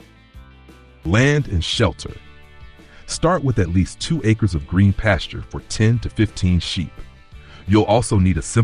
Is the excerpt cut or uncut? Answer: cut